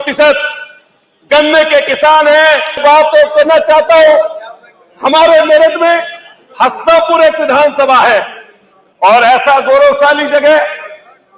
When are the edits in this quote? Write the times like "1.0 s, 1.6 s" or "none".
2.8 s